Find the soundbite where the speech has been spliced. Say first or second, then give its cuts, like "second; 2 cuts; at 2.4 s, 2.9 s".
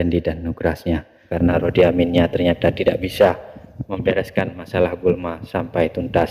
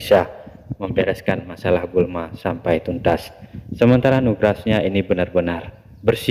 first; 1 cut; at 1.3 s